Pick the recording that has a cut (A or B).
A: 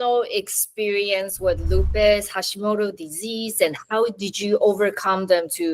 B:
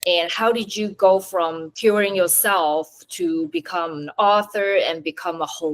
B